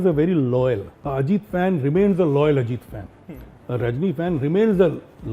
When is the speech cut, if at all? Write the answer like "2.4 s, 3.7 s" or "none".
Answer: 0.9 s